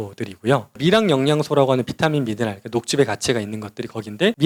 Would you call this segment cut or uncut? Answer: uncut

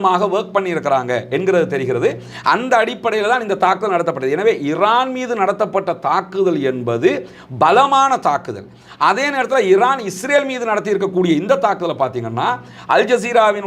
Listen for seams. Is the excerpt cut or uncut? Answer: uncut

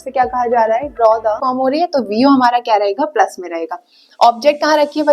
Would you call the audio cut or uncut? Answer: cut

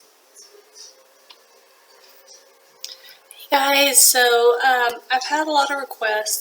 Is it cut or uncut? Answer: cut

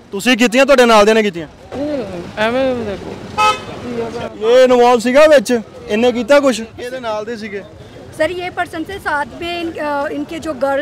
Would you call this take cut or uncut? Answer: cut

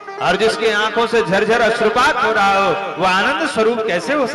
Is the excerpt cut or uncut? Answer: uncut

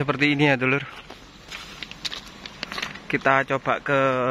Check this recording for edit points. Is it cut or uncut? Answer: uncut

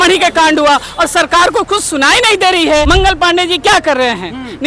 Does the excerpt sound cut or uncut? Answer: cut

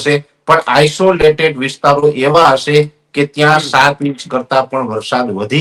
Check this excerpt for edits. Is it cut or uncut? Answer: uncut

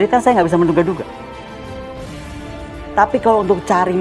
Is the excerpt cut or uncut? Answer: cut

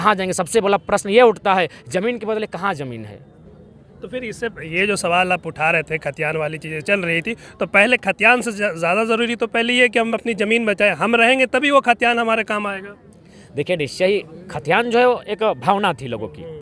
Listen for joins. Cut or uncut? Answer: uncut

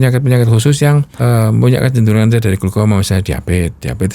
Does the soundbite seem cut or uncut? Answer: cut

